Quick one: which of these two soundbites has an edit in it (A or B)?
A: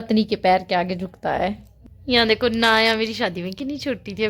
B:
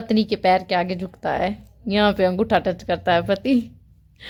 A